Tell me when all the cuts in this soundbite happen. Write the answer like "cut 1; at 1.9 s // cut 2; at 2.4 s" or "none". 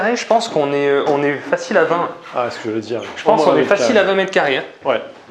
none

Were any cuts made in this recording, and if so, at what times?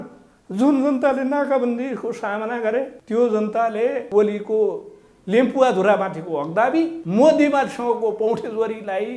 cut 1; at 3.0 s // cut 2; at 4.0 s // cut 3; at 7.0 s

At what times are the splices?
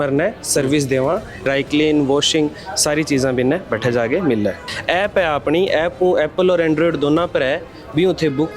cut 1; at 1.4 s // cut 2; at 4.7 s

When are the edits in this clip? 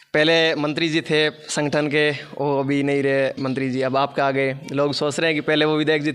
none

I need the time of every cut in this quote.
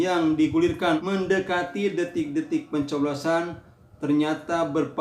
cut 1; at 1.0 s

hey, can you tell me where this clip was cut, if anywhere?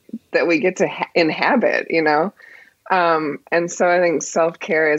none

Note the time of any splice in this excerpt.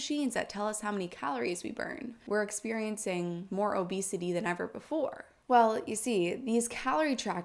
cut 1; at 2.1 s // cut 2; at 3.4 s

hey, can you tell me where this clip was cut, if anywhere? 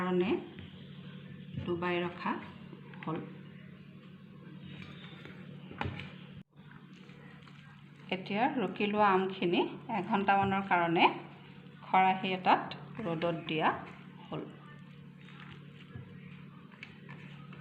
cut 1; at 6.5 s

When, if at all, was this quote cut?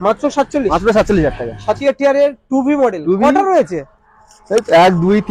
cut 1; at 1.8 s

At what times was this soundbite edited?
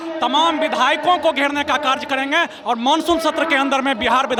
none

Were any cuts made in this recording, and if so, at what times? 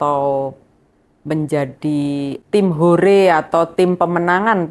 cut 1; at 2.4 s

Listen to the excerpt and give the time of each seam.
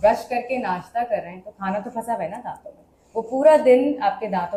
none

